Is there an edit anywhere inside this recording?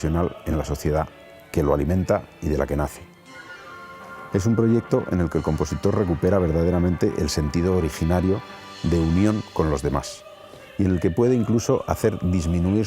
yes; 1 cut; at 10.2 s

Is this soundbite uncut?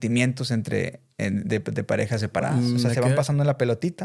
no; 1 cut; at 2.9 s

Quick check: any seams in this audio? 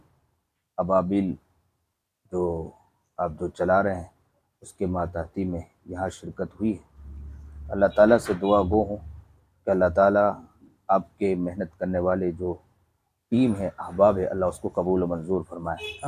no; 0 cuts

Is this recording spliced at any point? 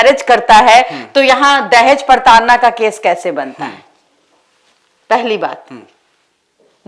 no; 0 cuts

